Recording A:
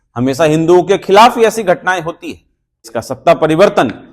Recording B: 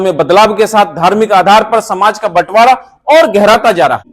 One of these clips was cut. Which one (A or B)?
A